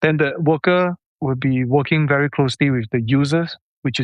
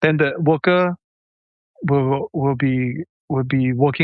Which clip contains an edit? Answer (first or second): first